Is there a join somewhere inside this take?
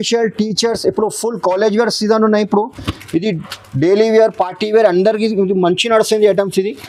no; 0 cuts

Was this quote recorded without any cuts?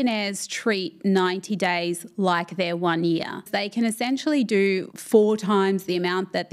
no; 2 cuts; at 3.5 s, 4.9 s

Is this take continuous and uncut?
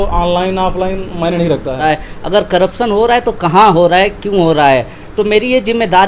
no; 1 cut; at 1.8 s

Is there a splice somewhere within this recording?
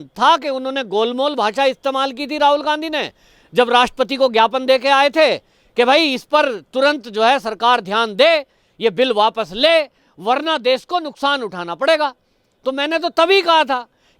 no; 0 cuts

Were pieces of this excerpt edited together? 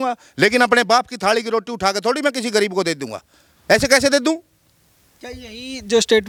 no; 0 cuts

